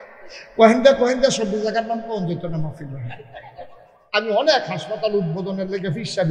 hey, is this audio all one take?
no; 1 cut; at 4.0 s

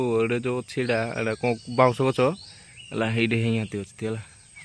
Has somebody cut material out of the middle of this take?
no; 0 cuts

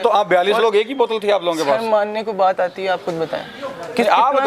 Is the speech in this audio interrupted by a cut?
no; 0 cuts

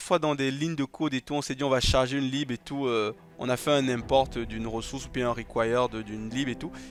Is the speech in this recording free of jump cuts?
yes; 0 cuts

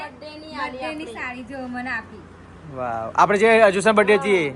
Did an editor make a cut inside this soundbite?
no; 0 cuts

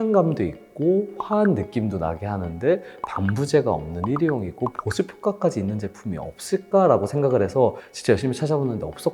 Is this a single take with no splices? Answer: yes; 0 cuts

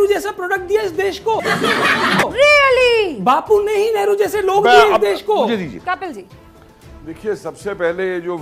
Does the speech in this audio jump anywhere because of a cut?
no; 0 cuts

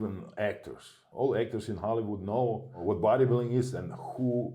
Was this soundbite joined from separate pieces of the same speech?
yes; 1 cut; at 1.0 s

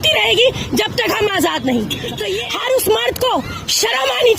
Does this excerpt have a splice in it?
yes; 1 cut; at 2.2 s

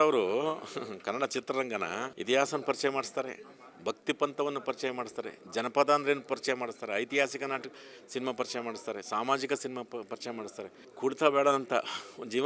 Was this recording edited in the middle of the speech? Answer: yes; 2 cuts; at 2.1 s, 10.8 s

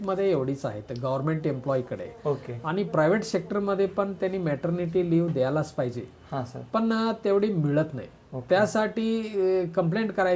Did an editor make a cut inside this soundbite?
no; 0 cuts

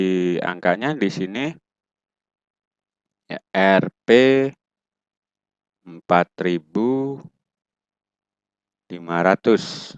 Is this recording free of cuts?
yes; 0 cuts

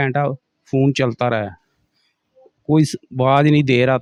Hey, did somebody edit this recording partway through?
no; 0 cuts

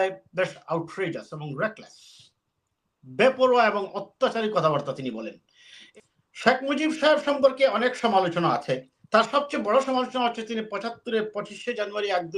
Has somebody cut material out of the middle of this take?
yes; 1 cut; at 5.8 s

